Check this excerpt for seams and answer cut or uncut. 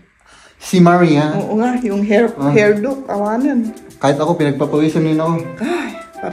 uncut